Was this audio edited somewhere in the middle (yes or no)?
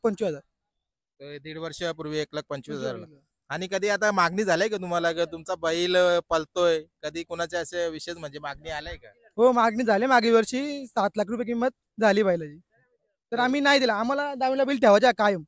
no